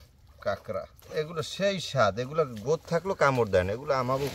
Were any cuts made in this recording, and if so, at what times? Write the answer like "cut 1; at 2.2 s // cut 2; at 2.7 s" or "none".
cut 1; at 1.0 s